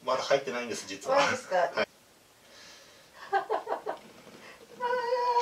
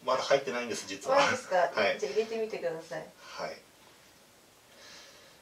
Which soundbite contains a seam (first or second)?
first